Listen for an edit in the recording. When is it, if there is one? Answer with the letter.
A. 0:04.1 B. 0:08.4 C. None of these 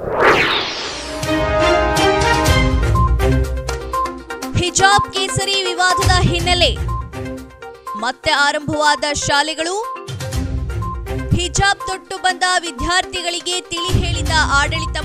A